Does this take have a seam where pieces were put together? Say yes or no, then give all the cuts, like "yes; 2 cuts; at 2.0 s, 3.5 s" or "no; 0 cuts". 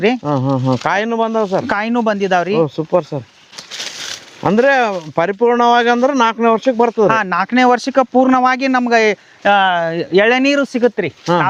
no; 0 cuts